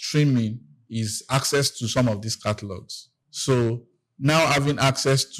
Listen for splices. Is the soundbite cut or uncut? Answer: uncut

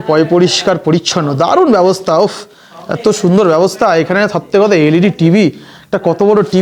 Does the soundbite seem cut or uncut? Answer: uncut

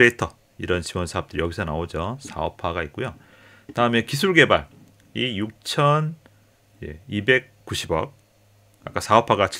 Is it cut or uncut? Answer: uncut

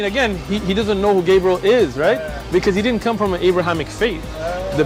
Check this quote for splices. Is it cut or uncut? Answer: uncut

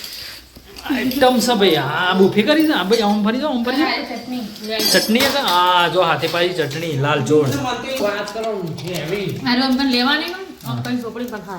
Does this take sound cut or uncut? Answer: cut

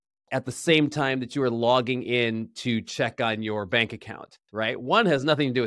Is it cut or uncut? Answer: uncut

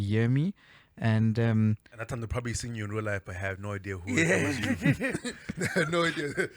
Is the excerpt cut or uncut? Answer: uncut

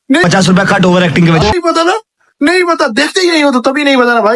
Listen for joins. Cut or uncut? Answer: uncut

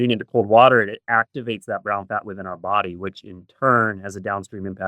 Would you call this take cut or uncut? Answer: uncut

